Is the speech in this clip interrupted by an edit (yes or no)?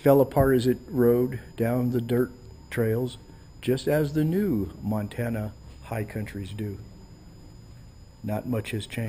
yes